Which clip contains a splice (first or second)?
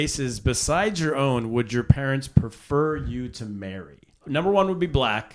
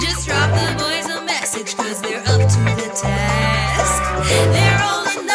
first